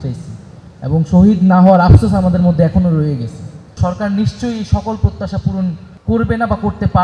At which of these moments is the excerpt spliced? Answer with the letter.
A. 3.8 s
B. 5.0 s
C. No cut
A